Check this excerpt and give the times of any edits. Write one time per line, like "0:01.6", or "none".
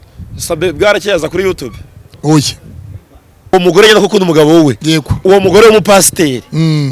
0:03.5